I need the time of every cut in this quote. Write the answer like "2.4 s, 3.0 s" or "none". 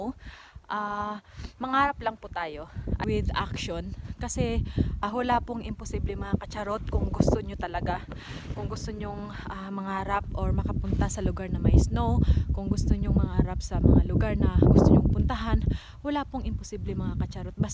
3.0 s, 5.0 s